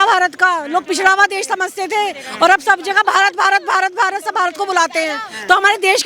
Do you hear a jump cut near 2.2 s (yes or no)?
no